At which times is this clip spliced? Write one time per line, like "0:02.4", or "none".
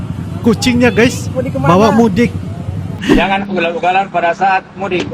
0:02.9

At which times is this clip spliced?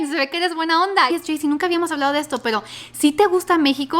0:01.1

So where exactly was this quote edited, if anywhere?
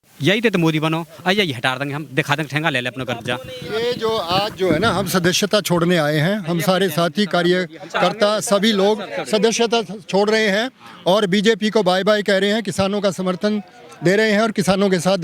none

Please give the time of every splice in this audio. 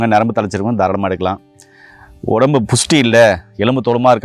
none

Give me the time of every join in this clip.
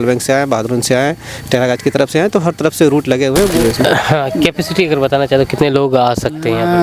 0:03.5

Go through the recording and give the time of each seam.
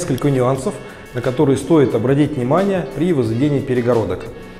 none

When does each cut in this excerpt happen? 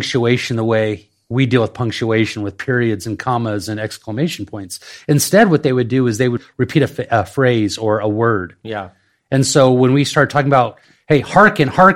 0:06.4

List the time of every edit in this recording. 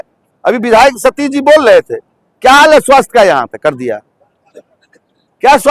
none

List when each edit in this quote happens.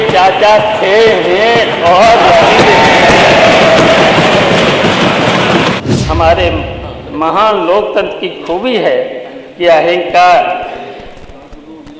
0:05.8

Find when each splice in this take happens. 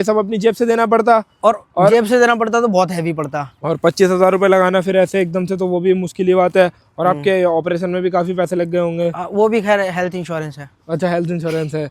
none

